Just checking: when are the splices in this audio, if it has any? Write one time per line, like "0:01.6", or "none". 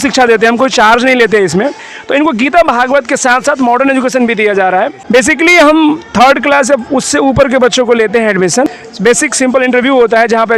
0:01.9
0:05.0
0:08.8